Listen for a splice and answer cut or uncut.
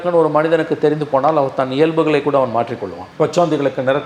uncut